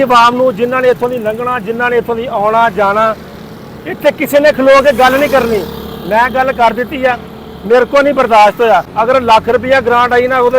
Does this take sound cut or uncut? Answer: cut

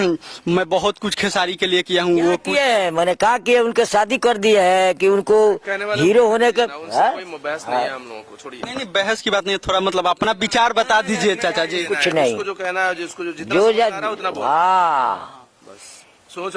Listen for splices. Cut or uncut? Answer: uncut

